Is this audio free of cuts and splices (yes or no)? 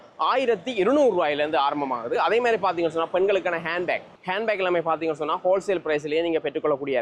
yes